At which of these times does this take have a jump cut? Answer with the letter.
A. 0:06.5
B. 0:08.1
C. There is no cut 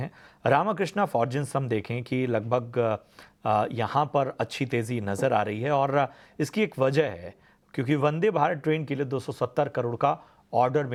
C